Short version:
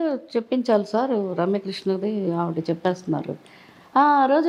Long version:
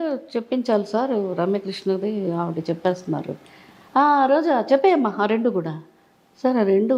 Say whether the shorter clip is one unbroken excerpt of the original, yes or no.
yes